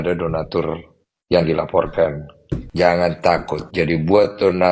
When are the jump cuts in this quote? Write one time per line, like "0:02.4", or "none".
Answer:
0:02.6